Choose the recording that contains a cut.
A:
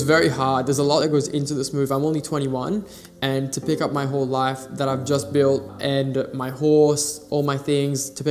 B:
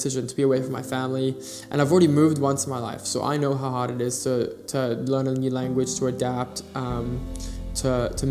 A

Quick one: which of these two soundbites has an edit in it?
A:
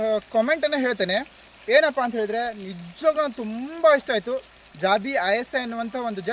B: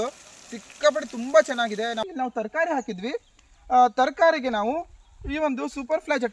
B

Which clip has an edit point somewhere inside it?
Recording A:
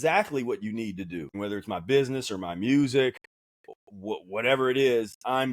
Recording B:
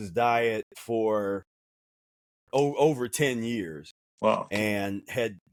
A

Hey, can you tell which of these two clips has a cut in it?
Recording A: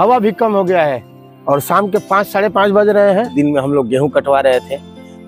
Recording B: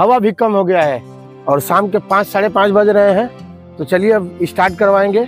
A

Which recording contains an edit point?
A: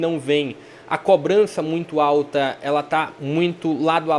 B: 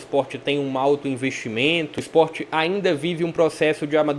B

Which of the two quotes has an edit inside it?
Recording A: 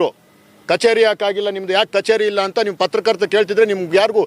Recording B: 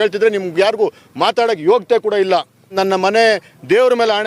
B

